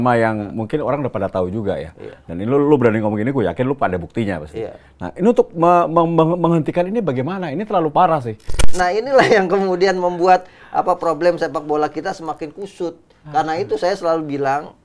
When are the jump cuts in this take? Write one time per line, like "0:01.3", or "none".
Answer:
0:08.6

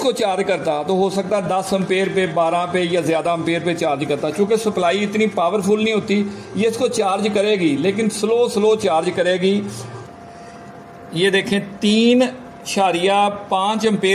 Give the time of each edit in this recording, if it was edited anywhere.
0:10.1

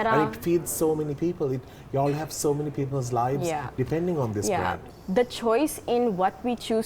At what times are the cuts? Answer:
0:04.8

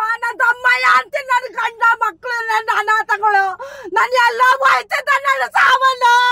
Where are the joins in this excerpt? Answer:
none

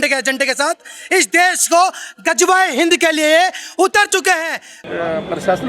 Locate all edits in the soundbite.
0:04.8

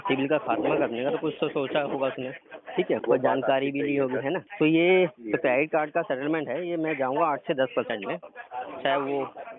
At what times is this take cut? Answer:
0:03.0
0:04.5

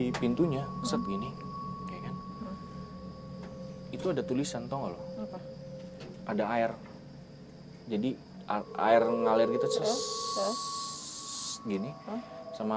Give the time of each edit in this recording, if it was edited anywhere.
none

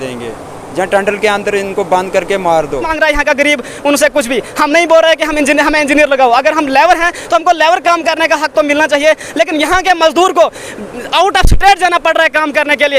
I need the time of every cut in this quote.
0:02.9

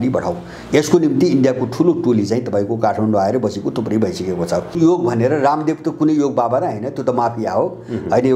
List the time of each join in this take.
0:04.8

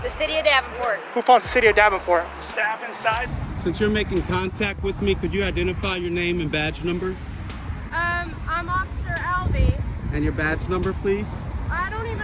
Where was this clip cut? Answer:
0:03.3

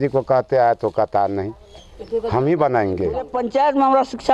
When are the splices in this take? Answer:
0:03.4

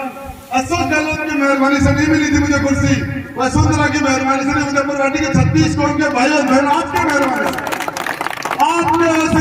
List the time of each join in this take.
none

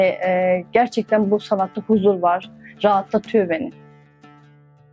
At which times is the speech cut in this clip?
0:03.7

